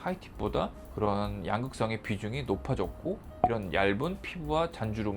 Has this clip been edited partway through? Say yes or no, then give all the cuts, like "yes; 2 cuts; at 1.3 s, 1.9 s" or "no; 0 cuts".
no; 0 cuts